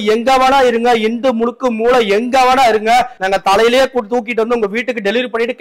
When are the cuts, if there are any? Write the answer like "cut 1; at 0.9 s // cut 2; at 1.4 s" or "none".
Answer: none